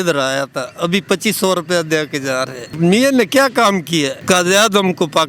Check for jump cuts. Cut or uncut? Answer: cut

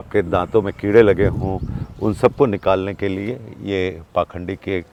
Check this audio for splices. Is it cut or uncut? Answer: uncut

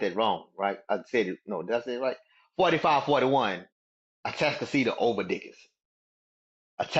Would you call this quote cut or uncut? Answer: uncut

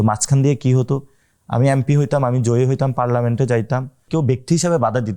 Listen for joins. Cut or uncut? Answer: cut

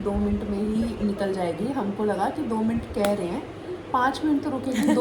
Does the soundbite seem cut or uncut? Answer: uncut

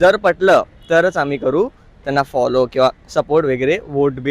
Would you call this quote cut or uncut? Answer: uncut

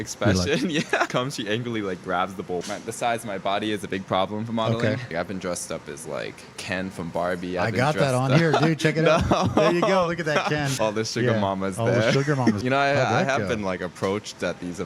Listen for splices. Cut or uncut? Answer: cut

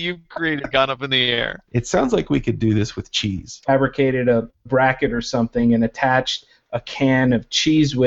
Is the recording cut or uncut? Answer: cut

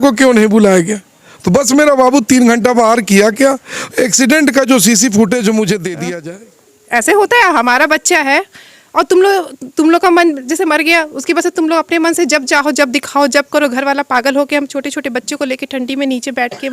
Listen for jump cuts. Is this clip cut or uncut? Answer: cut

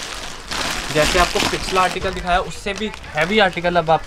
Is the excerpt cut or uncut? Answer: uncut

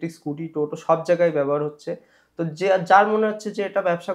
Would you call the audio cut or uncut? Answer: uncut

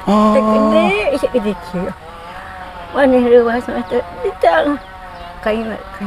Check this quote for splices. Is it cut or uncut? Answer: uncut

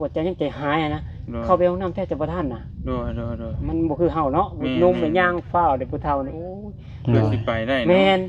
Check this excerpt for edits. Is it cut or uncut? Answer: uncut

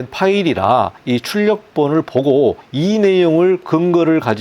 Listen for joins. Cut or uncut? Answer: cut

